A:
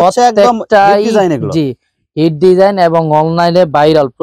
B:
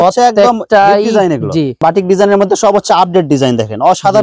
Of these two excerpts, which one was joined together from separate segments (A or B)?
B